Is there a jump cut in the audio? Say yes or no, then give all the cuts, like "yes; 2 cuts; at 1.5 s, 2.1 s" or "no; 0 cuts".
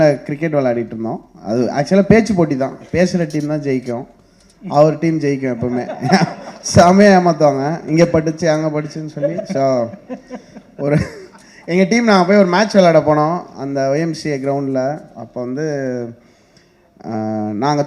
no; 0 cuts